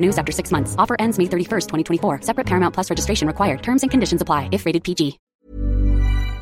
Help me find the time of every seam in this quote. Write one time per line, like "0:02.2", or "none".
0:05.2